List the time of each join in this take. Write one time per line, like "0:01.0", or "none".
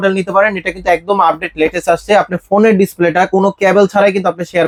none